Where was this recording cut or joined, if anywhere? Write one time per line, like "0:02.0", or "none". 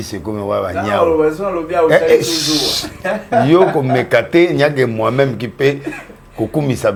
none